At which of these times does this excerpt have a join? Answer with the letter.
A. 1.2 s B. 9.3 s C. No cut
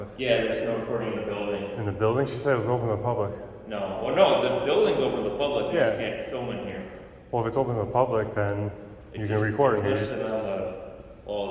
C